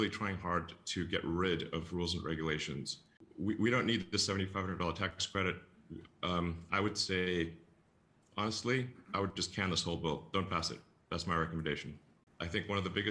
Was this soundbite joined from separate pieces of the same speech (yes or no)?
yes